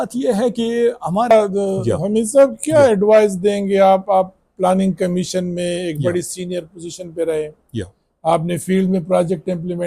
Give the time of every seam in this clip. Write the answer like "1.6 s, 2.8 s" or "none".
1.3 s